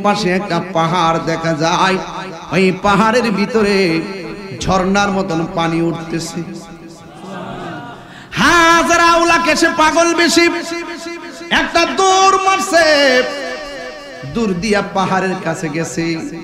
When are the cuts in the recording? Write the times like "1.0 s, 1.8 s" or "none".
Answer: none